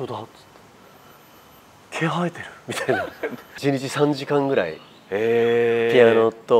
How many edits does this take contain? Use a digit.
1